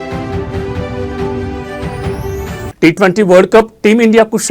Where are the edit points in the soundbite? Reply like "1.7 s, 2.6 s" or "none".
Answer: 2.3 s